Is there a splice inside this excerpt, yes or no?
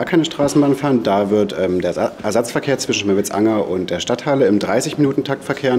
no